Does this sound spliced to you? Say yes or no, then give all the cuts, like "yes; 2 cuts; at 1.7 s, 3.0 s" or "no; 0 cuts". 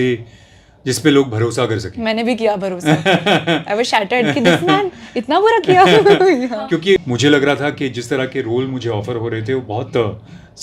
yes; 1 cut; at 7.0 s